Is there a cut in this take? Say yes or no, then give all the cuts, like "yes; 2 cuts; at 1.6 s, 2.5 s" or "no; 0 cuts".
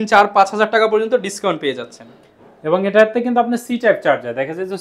no; 0 cuts